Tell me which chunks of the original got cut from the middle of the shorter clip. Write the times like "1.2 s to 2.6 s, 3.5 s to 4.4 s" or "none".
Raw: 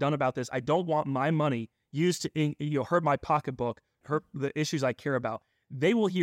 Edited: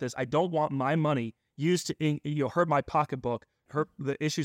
none